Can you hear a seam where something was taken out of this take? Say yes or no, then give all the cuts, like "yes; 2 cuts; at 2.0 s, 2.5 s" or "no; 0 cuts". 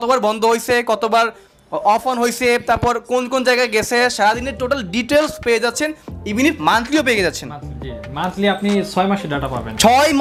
no; 0 cuts